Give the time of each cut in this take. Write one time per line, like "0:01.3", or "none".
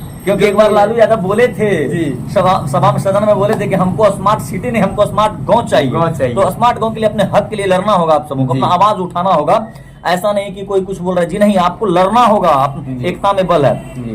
none